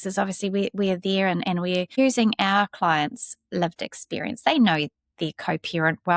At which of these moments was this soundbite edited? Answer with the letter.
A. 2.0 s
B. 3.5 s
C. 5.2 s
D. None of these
A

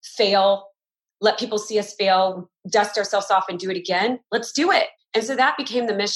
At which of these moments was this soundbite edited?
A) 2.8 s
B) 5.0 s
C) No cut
B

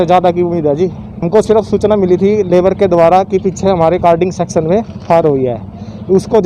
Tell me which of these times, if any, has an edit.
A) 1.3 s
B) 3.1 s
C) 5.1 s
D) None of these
A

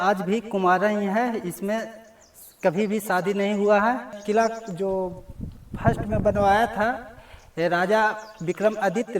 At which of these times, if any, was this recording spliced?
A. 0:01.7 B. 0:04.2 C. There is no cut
B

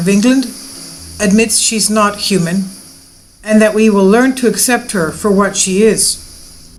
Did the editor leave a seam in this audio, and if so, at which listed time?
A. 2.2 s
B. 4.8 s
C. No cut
C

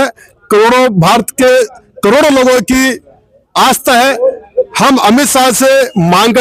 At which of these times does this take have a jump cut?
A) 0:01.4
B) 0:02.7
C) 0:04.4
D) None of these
D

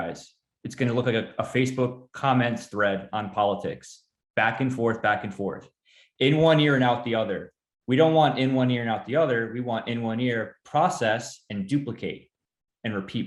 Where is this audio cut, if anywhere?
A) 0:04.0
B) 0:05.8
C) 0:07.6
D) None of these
D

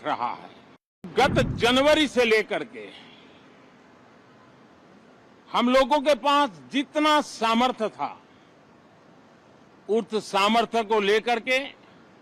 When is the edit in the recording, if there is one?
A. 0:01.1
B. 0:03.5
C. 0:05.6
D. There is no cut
A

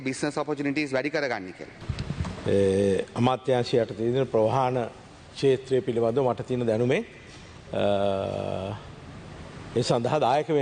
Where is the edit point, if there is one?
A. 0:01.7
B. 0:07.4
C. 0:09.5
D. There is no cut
A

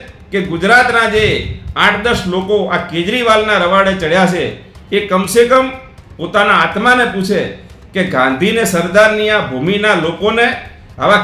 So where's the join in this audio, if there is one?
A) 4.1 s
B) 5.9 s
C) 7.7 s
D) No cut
D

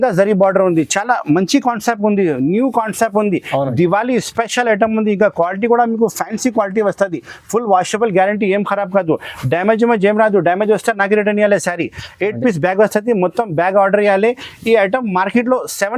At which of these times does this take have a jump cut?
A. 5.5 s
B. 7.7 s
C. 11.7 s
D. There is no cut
D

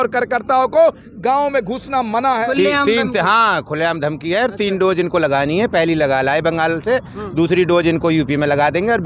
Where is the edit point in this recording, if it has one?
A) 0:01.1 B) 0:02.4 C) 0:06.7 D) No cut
B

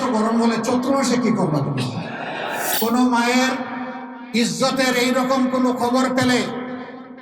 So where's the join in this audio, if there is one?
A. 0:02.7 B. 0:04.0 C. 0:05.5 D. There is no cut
A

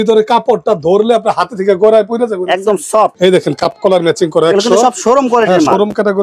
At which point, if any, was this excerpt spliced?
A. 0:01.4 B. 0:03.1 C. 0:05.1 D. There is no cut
B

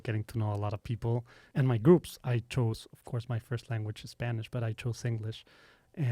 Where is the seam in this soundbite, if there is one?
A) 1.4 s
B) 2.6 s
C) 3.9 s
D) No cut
A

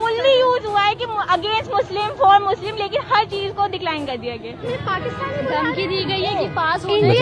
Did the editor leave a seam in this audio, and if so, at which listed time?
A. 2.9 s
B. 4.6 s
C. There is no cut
B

